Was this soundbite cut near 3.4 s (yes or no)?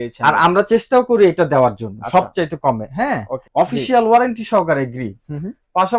yes